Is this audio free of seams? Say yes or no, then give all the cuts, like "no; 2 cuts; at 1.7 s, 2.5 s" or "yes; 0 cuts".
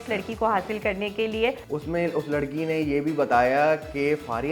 no; 1 cut; at 1.7 s